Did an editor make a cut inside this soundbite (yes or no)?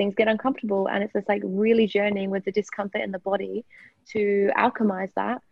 no